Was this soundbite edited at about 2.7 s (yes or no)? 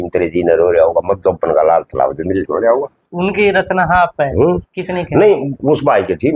no